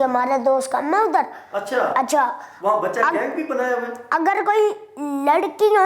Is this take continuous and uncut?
yes; 0 cuts

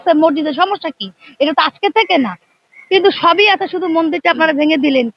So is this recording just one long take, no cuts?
yes; 0 cuts

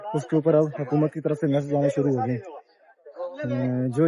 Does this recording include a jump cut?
no; 0 cuts

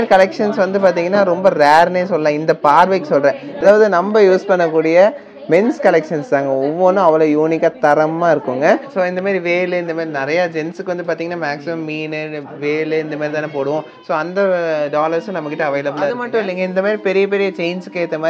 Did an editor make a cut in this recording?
yes; 2 cuts; at 3.5 s, 8.9 s

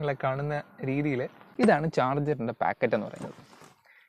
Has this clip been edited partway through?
yes; 1 cut; at 1.4 s

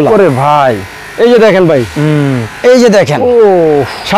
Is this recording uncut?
yes; 0 cuts

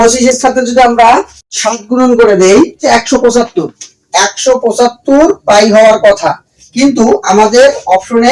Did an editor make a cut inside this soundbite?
yes; 1 cut; at 2.8 s

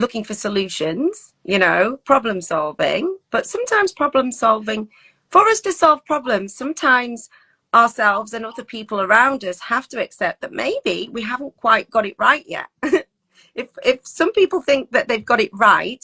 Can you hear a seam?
no; 0 cuts

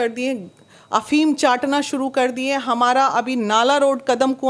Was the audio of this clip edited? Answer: no; 0 cuts

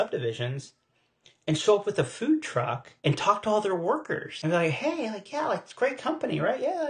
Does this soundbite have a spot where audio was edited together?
yes; 2 cuts; at 2.8 s, 4.3 s

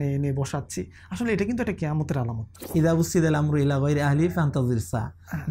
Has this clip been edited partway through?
yes; 1 cut; at 2.6 s

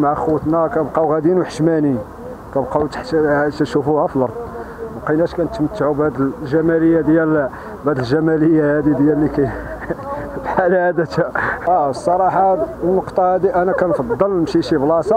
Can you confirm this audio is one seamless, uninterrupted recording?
yes; 0 cuts

